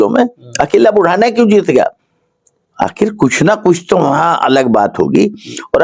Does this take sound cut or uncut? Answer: uncut